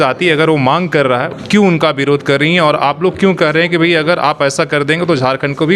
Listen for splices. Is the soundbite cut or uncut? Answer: cut